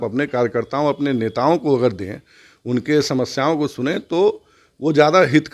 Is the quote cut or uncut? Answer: uncut